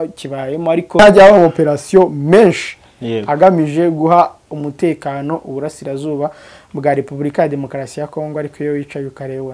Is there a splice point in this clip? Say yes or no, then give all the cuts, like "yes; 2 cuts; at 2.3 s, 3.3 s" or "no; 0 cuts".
yes; 1 cut; at 1.0 s